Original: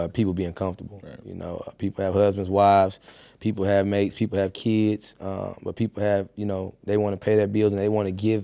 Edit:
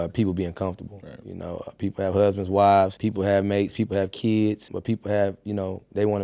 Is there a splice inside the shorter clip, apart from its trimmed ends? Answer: yes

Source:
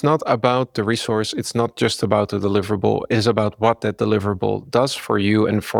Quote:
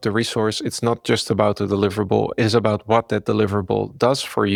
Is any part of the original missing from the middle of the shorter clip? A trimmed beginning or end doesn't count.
no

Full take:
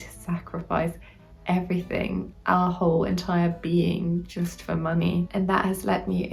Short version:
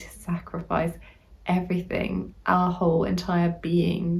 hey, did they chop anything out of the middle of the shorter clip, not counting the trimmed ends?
no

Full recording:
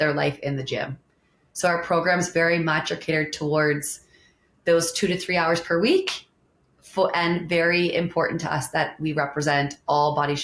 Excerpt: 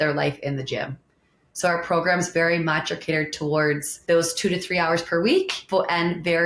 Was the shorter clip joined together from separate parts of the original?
yes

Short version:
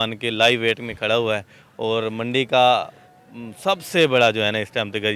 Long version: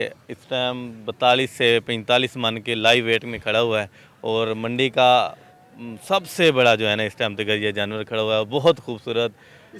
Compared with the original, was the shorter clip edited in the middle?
no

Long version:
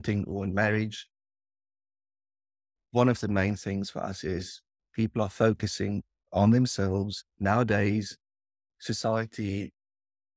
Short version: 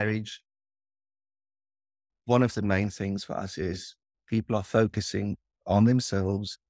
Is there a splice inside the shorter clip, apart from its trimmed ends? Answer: no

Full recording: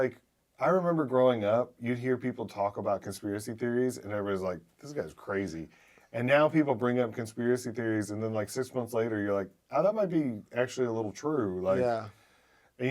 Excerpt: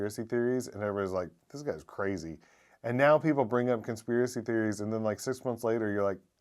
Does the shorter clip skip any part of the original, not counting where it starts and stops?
no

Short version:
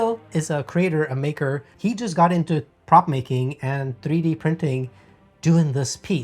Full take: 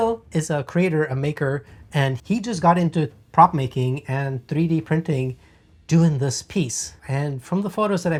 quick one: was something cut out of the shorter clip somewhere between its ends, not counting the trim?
yes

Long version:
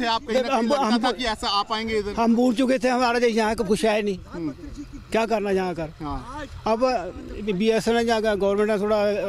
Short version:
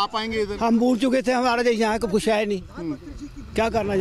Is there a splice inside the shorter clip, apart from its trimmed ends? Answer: no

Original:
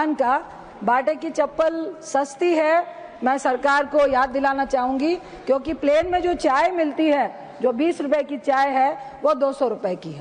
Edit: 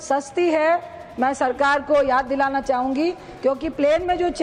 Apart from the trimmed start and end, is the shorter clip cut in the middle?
no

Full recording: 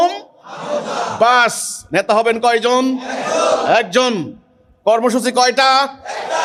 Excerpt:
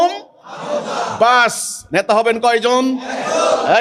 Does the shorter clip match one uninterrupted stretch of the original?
yes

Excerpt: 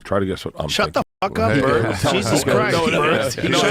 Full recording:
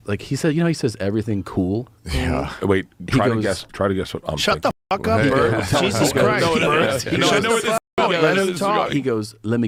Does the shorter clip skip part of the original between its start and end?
no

